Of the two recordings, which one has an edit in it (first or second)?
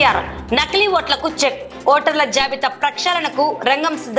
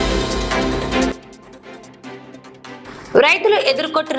second